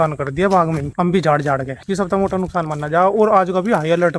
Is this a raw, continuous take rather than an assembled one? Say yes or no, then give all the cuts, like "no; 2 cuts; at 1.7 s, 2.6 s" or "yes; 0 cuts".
no; 2 cuts; at 0.9 s, 1.7 s